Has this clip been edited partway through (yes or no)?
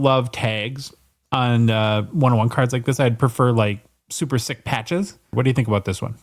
yes